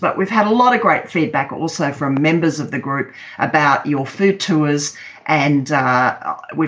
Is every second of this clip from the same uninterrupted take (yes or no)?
yes